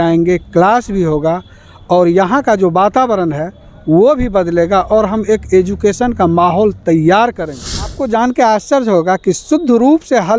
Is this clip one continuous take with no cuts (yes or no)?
no